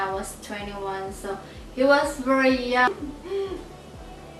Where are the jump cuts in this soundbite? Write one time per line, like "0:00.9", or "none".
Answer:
0:02.9